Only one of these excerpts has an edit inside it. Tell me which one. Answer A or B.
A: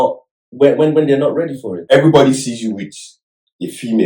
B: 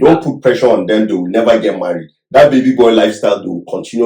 A